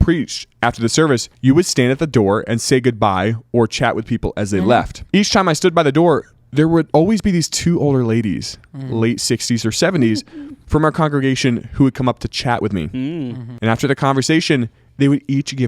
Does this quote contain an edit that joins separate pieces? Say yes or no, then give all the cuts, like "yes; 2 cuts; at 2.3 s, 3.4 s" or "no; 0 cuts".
yes; 3 cuts; at 1.3 s, 5.0 s, 6.9 s